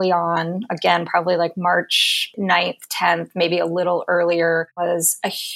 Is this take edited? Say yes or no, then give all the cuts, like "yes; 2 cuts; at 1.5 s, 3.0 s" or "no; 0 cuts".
yes; 2 cuts; at 2.2 s, 4.8 s